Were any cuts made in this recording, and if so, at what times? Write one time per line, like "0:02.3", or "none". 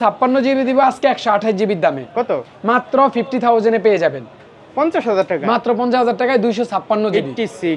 none